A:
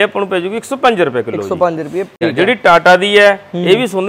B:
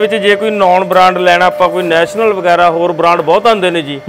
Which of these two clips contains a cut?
A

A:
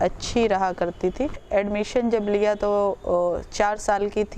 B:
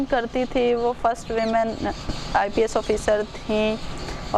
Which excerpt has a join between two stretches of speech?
A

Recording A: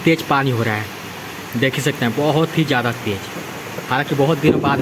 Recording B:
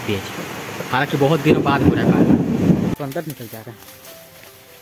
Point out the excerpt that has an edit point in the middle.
B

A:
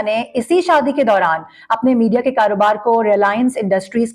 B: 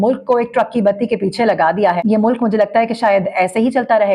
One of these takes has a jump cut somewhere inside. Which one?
B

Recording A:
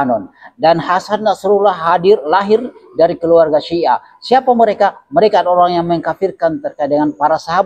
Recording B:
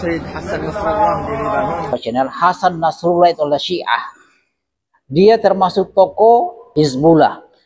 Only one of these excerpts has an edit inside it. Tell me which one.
B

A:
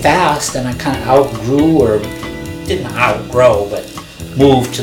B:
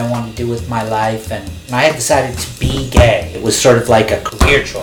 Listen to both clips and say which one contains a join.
B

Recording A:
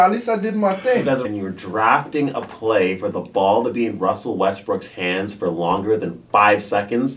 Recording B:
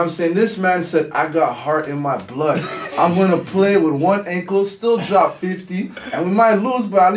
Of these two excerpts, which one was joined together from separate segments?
A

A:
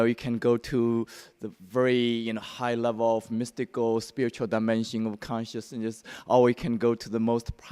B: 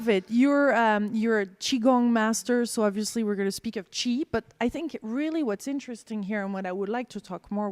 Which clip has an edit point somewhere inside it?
A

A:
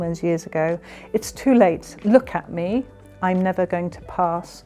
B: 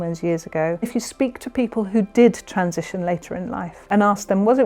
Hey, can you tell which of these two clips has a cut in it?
B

